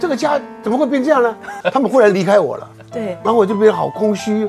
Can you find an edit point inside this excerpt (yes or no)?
yes